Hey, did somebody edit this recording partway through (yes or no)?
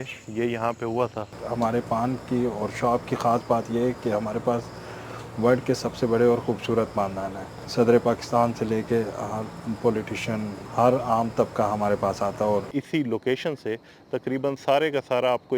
yes